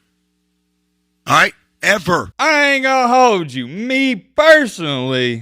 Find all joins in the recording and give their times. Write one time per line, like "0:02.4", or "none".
0:02.3